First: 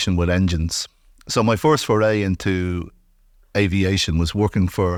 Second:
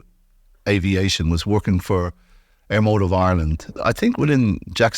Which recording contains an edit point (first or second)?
second